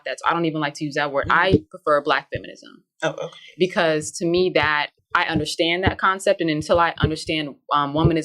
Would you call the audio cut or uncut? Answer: cut